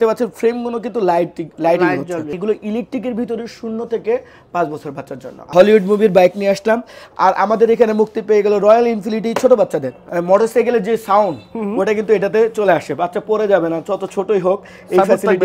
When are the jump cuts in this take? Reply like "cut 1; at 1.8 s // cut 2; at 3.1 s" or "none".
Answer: cut 1; at 2.3 s // cut 2; at 5.4 s // cut 3; at 10.0 s